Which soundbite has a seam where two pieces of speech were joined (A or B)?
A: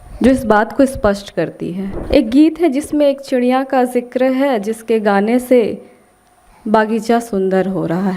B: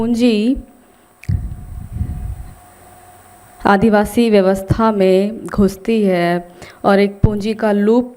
A